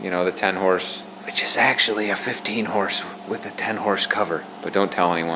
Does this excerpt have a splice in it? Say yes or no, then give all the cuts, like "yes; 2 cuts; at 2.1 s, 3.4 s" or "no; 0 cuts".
no; 0 cuts